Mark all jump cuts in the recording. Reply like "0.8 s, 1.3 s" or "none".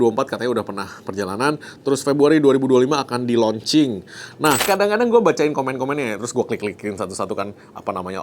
4.6 s